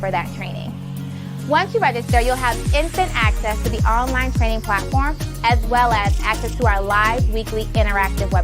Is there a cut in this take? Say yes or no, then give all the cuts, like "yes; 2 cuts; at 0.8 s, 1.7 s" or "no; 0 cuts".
no; 0 cuts